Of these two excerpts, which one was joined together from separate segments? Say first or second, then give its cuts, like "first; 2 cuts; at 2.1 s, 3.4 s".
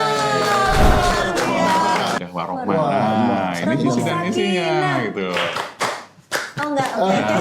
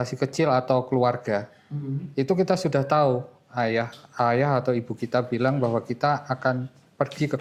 first; 1 cut; at 2.2 s